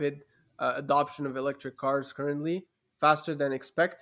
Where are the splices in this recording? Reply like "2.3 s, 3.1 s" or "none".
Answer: none